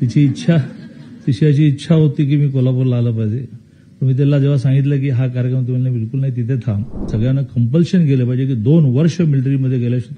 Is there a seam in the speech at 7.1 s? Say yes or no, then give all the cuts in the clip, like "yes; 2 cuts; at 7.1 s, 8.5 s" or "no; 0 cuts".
yes; 1 cut; at 7.1 s